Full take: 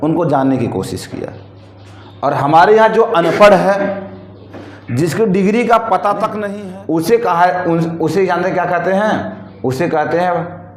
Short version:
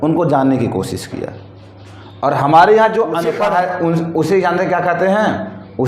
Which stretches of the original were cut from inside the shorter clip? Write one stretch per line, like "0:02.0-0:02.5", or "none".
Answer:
0:03.3-0:07.1